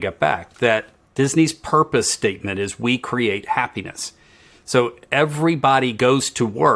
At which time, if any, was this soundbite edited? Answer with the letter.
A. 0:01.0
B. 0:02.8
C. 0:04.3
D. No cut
A